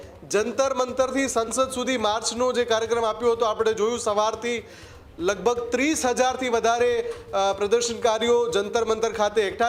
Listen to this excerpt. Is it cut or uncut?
uncut